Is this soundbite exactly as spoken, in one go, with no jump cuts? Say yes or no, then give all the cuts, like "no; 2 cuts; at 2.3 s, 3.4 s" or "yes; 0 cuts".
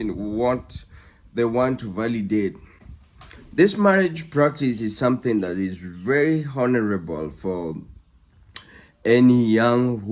yes; 0 cuts